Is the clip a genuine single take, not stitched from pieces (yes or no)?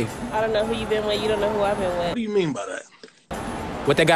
yes